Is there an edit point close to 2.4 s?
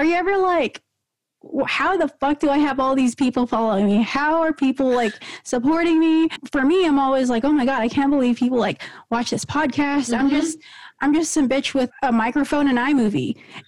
no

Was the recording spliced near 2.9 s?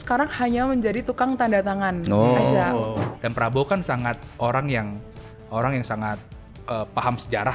yes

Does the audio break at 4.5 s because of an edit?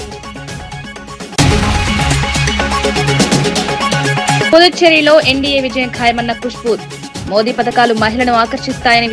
yes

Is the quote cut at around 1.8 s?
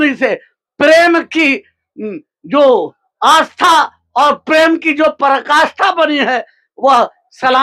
no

